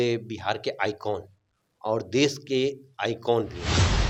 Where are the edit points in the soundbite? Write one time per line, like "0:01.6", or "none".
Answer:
none